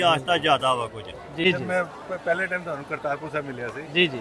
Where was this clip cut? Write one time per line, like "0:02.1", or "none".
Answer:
0:01.4

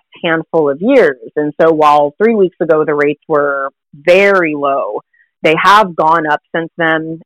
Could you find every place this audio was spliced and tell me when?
none

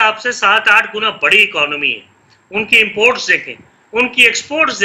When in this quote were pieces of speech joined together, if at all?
none

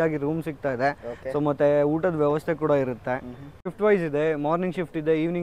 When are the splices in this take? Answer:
0:03.7

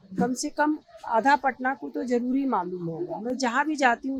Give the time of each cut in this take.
none

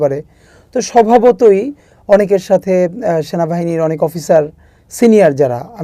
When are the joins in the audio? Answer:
none

